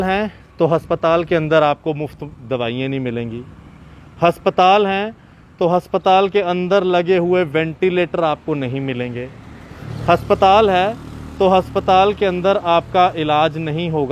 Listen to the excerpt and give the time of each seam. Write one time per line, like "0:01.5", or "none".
none